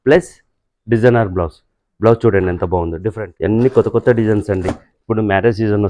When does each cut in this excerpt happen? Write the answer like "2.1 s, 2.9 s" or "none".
3.0 s